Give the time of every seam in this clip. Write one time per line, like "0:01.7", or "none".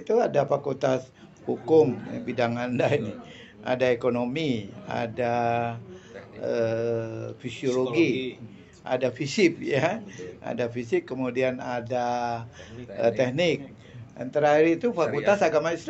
none